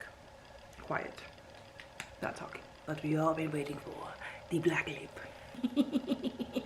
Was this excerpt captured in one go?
no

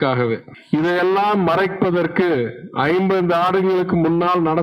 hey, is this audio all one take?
yes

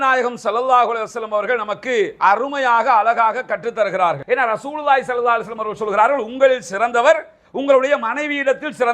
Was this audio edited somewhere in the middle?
yes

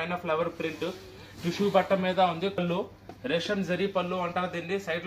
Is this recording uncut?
no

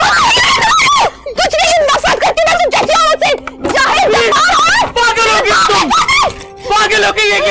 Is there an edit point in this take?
no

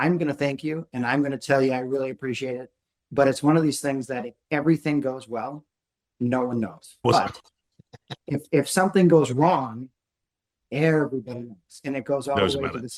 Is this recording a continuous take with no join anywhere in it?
yes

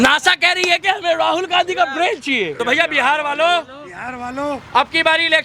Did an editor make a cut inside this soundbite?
yes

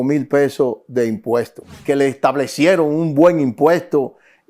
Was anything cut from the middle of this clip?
yes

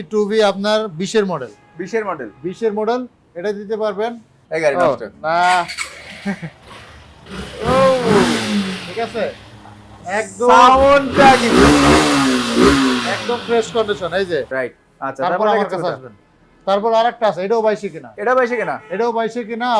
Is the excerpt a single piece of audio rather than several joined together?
no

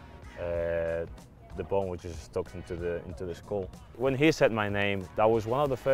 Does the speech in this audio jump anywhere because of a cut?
yes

